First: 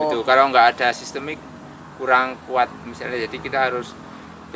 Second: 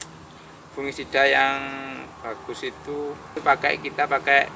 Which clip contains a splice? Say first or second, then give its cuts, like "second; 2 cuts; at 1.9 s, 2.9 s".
second; 1 cut; at 3.4 s